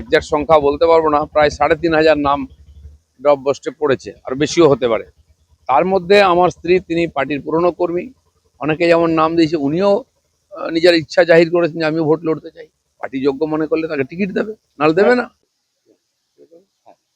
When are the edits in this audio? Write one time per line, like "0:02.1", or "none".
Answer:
0:15.5